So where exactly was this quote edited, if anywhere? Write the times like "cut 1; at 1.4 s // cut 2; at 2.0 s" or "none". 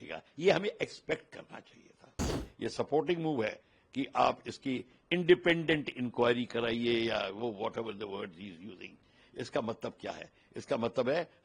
cut 1; at 2.3 s